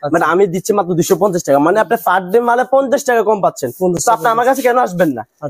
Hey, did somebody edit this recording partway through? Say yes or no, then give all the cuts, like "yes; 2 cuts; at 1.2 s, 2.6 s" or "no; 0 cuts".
no; 0 cuts